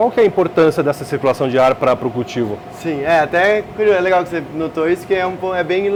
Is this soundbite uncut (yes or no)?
yes